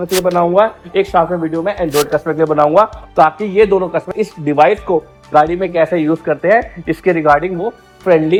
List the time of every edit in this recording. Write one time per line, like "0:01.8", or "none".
none